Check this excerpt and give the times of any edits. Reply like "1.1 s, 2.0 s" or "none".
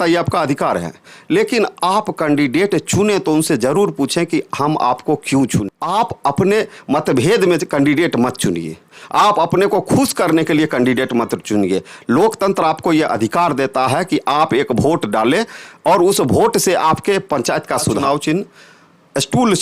5.8 s, 18.0 s